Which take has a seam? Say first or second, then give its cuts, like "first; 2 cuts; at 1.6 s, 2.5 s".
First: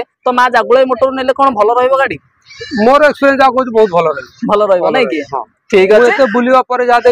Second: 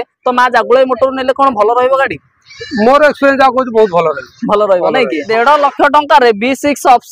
second; 1 cut; at 5.3 s